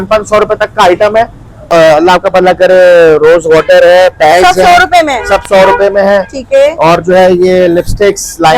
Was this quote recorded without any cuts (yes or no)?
no